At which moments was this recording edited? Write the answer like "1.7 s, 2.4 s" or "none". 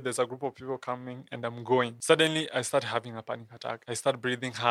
2.0 s, 3.8 s